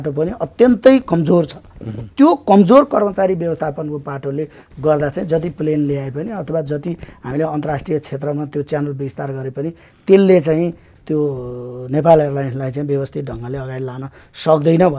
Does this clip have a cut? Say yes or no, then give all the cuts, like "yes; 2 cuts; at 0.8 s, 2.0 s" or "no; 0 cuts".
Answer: no; 0 cuts